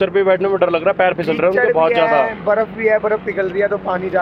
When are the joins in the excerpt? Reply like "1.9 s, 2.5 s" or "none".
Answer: none